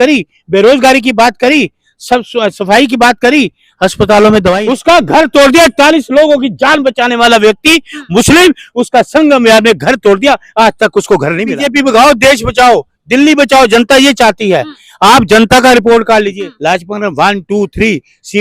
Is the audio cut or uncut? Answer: cut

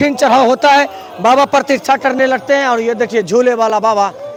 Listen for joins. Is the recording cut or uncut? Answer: uncut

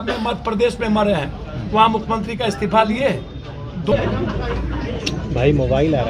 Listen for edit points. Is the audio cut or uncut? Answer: cut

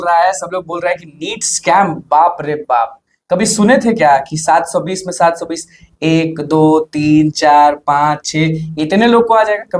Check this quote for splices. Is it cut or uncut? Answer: uncut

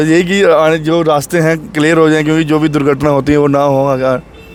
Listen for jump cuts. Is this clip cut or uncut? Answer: uncut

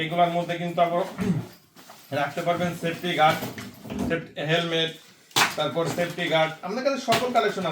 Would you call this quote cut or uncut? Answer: uncut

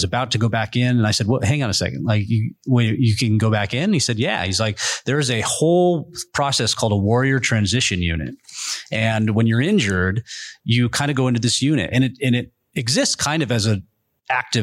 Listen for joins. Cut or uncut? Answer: uncut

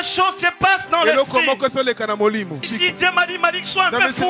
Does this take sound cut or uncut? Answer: cut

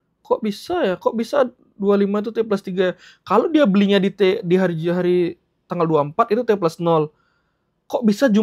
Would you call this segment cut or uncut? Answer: uncut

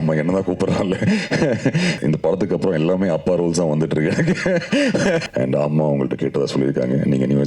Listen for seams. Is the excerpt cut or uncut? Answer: cut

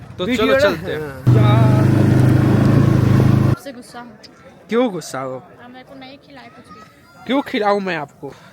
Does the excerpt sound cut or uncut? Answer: cut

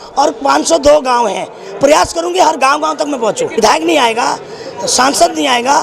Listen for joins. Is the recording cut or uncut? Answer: cut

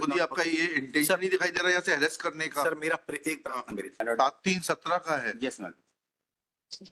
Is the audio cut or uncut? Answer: cut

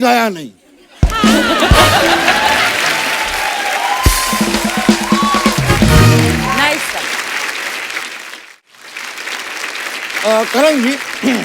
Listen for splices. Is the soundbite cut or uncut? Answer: uncut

